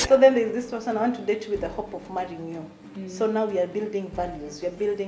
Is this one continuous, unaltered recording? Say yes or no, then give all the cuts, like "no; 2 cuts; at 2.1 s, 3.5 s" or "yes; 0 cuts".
yes; 0 cuts